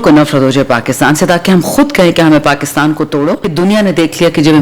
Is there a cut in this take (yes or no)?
yes